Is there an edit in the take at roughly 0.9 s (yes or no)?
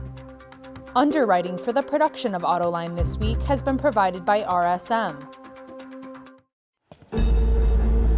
yes